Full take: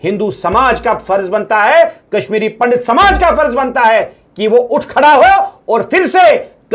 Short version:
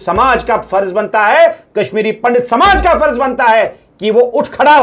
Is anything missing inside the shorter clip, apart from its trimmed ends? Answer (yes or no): no